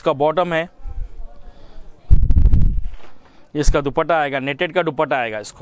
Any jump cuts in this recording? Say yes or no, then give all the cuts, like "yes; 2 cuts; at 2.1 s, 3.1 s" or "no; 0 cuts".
no; 0 cuts